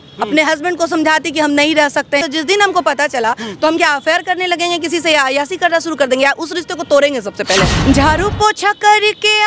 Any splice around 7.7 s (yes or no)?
yes